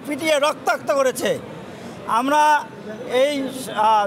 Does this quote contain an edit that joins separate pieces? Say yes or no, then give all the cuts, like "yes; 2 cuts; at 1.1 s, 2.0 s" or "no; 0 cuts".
no; 0 cuts